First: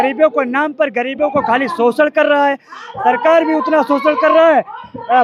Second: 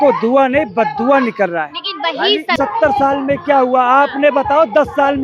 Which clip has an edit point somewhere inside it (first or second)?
second